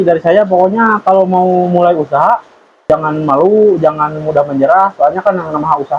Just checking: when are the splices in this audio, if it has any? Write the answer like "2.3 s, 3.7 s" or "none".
2.8 s